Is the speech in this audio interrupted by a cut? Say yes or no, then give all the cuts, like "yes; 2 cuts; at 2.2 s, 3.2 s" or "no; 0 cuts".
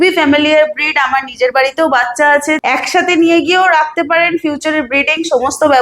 yes; 1 cut; at 2.6 s